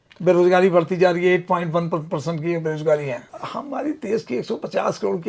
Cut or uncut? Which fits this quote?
cut